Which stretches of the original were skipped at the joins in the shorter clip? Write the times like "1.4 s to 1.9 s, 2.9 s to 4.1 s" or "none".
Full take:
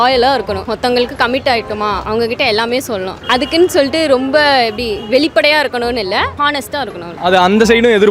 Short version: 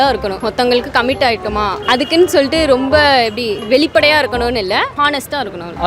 2.0 s to 3.2 s